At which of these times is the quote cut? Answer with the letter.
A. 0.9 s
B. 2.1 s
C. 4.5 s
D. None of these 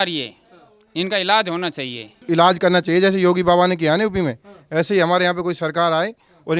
B